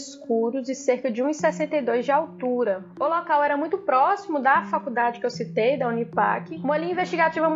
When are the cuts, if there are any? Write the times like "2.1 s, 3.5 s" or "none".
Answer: 2.9 s, 6.5 s